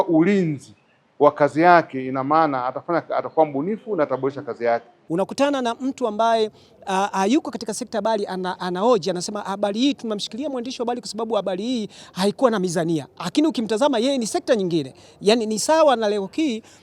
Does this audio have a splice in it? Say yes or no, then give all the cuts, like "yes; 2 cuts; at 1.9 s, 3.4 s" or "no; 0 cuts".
yes; 1 cut; at 4.9 s